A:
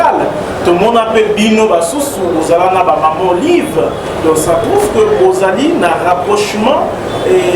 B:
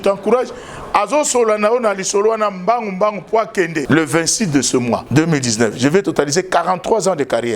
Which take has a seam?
B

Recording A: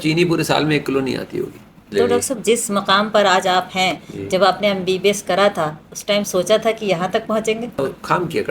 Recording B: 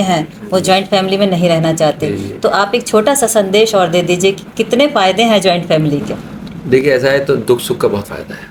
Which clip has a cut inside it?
A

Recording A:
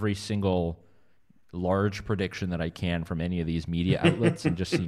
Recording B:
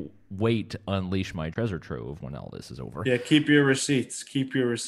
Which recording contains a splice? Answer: B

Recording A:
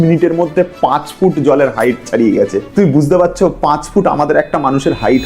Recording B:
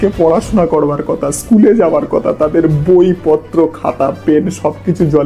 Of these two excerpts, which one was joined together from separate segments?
A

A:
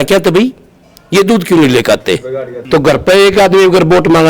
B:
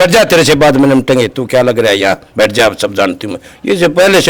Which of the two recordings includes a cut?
A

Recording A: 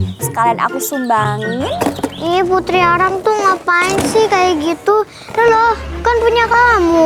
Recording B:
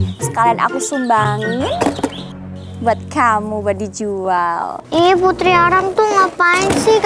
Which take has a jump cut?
A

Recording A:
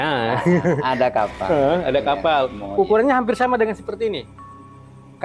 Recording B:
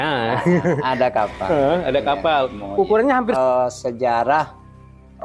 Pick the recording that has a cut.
B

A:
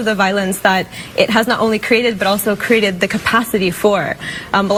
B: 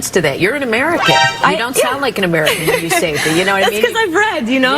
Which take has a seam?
B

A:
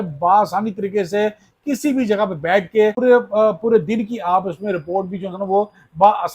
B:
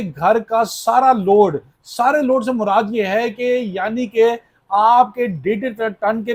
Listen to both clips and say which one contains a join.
A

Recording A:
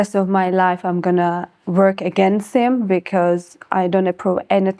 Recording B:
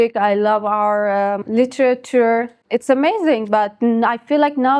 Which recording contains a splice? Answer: B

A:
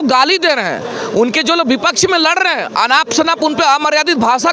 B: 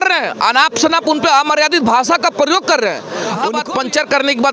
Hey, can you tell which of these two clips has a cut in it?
B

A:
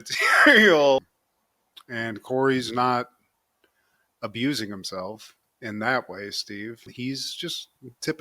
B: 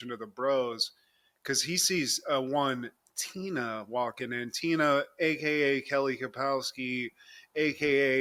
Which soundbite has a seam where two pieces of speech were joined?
A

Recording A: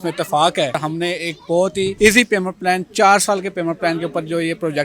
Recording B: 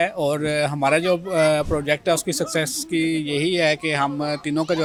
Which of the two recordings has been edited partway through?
A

